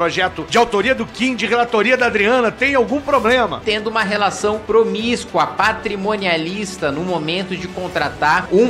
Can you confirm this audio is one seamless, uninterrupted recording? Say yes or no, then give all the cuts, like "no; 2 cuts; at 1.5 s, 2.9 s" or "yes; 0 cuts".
no; 1 cut; at 3.6 s